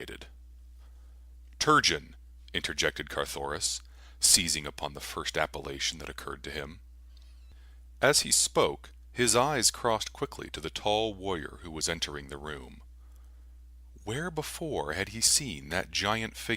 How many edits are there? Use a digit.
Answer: 1